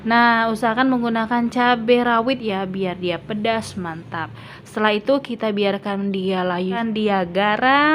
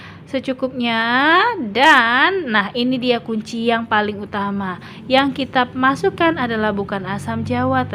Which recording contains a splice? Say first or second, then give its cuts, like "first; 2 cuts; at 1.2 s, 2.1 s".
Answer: first; 1 cut; at 6.8 s